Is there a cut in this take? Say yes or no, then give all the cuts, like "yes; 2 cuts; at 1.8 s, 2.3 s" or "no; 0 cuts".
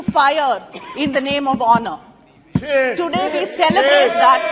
no; 0 cuts